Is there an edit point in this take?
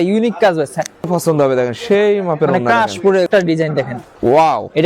yes; 2 cuts; at 1.1 s, 3.3 s

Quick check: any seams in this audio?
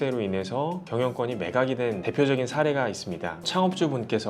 yes; 3 cuts; at 0.8 s, 2.0 s, 3.4 s

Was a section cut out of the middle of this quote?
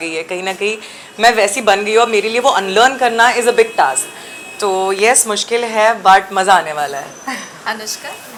no; 0 cuts

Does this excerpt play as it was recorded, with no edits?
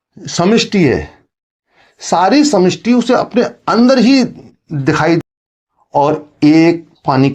no; 1 cut; at 5.2 s

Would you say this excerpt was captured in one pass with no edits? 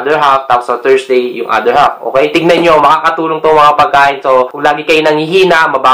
no; 2 cuts; at 2.3 s, 4.5 s

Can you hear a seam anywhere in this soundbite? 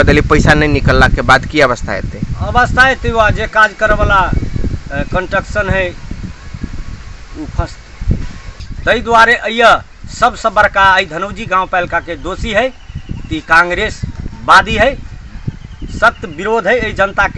yes; 1 cut; at 8.5 s

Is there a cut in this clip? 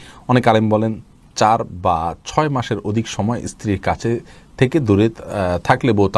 no; 0 cuts

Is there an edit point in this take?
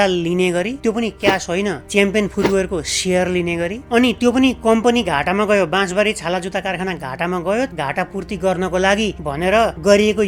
no; 0 cuts

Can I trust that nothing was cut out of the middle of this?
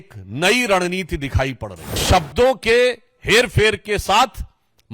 no; 1 cut; at 2.0 s

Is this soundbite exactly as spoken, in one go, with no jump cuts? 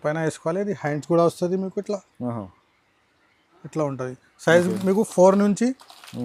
yes; 0 cuts

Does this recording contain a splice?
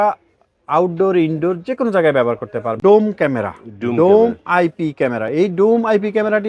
yes; 1 cut; at 2.8 s

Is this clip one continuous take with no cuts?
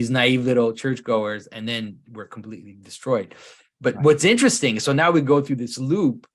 yes; 0 cuts

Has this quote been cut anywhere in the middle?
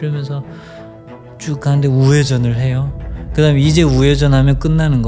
no; 0 cuts

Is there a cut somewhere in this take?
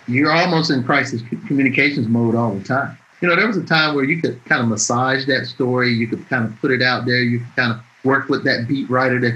yes; 2 cuts; at 3.1 s, 4.4 s

